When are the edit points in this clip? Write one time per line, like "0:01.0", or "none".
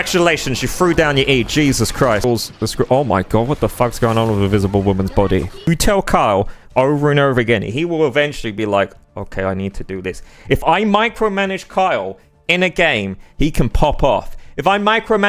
0:02.2
0:05.7